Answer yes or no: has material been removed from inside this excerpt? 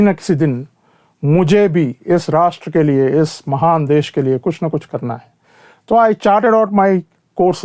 no